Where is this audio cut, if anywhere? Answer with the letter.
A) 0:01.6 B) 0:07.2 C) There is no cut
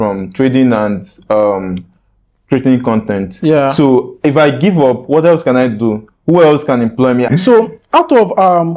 B